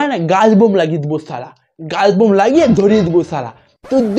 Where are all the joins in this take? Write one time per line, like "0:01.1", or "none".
0:01.4